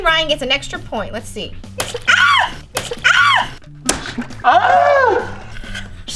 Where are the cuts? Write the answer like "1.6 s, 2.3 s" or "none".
1.6 s